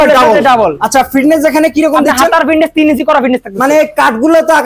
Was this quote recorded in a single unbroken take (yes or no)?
yes